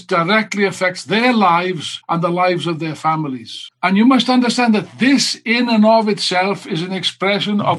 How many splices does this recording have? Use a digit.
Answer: 1